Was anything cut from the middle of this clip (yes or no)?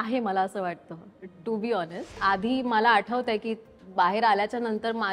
yes